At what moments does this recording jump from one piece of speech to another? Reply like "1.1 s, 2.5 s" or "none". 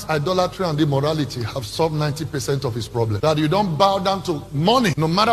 none

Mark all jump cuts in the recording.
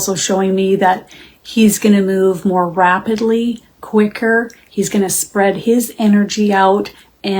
none

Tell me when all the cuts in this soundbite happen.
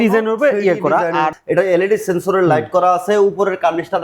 1.3 s

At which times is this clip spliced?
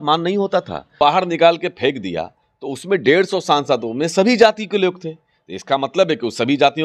1.0 s

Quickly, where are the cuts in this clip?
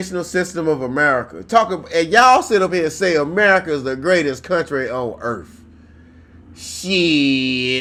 none

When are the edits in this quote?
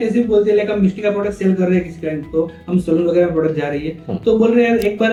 none

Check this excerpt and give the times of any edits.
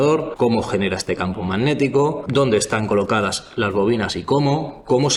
none

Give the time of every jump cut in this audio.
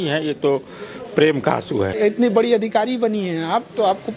1.9 s

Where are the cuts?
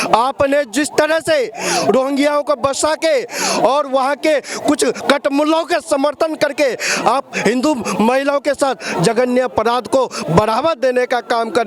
none

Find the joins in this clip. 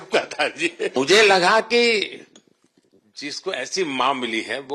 0.9 s

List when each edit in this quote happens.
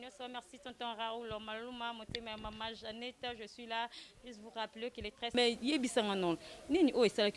5.3 s

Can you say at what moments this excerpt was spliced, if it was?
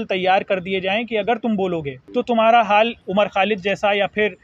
2.0 s, 3.0 s

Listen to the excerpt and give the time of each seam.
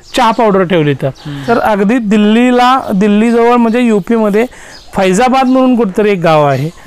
1.4 s

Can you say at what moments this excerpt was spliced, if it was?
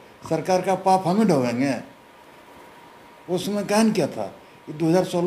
none

